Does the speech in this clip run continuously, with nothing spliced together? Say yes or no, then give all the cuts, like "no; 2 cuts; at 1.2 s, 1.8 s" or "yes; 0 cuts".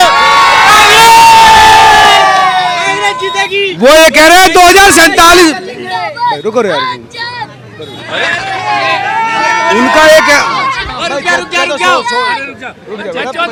yes; 0 cuts